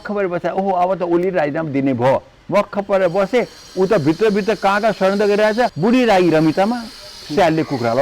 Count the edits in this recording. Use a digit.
1